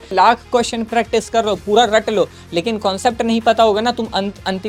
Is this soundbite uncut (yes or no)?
yes